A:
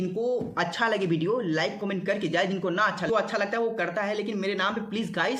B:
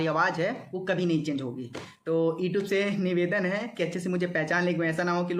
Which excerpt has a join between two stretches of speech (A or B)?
A